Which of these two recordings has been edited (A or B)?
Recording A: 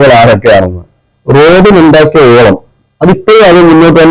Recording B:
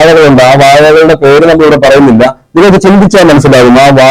A